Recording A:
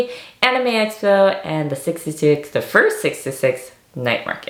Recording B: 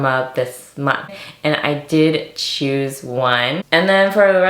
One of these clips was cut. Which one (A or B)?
B